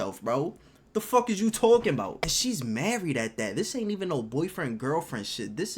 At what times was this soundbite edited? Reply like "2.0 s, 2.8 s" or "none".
2.4 s